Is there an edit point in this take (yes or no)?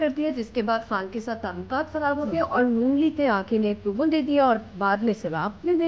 no